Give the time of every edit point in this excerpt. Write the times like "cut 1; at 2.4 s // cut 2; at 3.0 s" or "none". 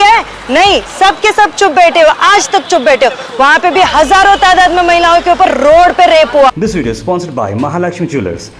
cut 1; at 6.5 s